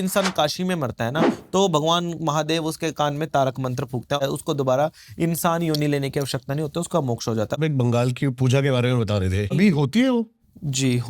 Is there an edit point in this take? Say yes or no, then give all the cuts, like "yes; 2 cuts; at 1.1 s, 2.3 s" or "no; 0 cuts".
yes; 3 cuts; at 4.2 s, 7.6 s, 9.5 s